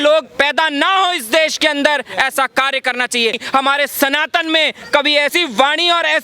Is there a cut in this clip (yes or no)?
yes